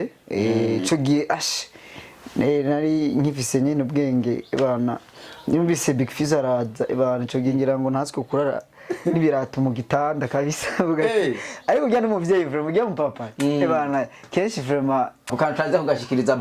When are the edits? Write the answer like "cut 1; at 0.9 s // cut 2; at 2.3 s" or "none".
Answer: cut 1; at 15.3 s